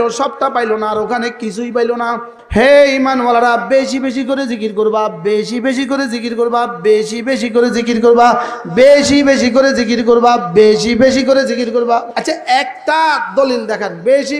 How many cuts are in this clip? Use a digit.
2